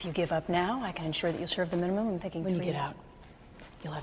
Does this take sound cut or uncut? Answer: uncut